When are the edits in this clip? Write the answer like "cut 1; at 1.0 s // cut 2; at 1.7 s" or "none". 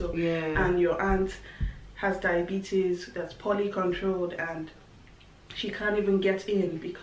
none